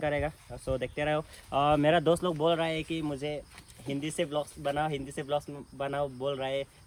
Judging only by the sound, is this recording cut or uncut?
uncut